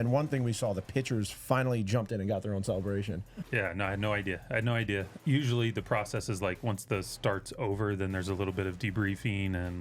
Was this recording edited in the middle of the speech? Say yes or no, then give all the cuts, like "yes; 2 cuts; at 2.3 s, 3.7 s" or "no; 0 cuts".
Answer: yes; 2 cuts; at 3.1 s, 5.1 s